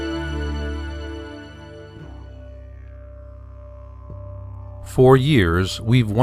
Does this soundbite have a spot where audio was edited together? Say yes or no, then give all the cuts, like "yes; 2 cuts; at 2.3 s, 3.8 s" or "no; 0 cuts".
no; 0 cuts